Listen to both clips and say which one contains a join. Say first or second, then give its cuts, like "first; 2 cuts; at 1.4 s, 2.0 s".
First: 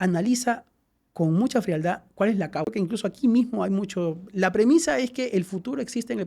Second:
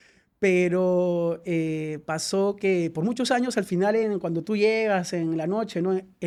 first; 1 cut; at 2.7 s